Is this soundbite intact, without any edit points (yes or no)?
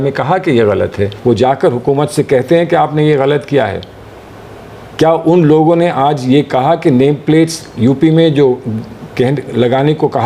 no